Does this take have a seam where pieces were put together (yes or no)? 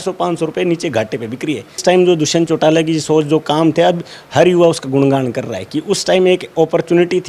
yes